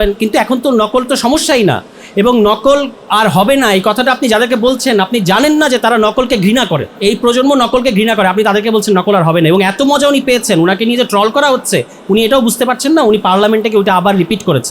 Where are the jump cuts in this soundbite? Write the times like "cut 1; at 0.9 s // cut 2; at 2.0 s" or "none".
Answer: cut 1; at 6.9 s